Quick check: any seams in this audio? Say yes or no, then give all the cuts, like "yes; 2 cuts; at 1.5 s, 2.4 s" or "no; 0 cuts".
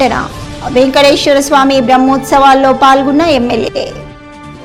no; 0 cuts